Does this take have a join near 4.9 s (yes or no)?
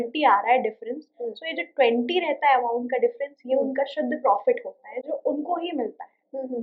no